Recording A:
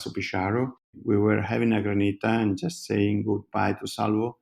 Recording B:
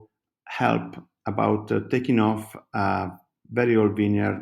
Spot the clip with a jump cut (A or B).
A